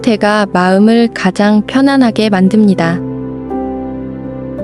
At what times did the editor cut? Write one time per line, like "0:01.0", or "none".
0:02.9